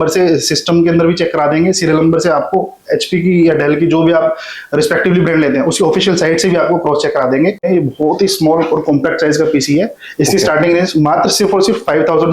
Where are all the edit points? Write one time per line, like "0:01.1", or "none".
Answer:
0:07.6